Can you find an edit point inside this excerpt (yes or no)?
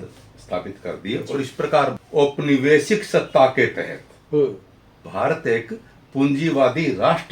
yes